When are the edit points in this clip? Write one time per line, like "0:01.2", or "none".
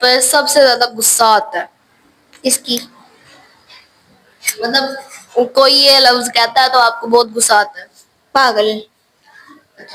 none